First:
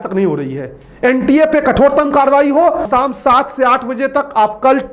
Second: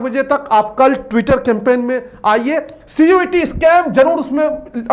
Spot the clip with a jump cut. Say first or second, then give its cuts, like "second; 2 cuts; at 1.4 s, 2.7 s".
first; 1 cut; at 2.9 s